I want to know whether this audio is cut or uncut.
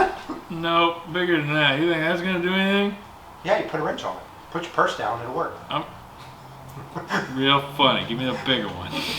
cut